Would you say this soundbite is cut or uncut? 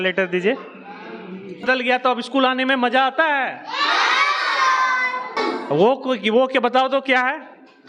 cut